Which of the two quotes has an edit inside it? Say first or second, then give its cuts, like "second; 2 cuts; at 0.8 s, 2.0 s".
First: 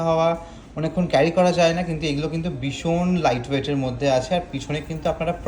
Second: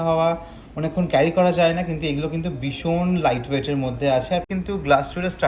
second; 1 cut; at 4.5 s